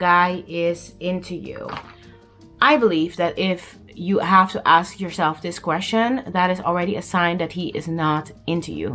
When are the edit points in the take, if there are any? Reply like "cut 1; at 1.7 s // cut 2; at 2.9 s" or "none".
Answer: none

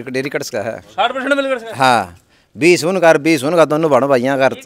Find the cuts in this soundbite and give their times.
none

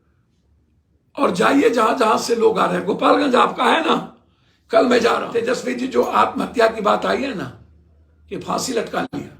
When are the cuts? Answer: cut 1; at 5.4 s

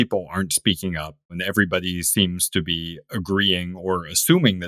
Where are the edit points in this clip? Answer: cut 1; at 1.3 s

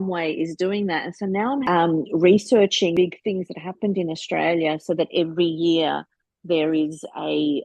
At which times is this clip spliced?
cut 1; at 1.6 s // cut 2; at 2.9 s

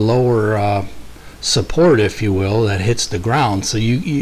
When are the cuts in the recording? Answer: none

